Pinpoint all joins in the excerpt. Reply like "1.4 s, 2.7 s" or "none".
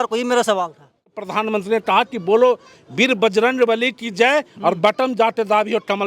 1.3 s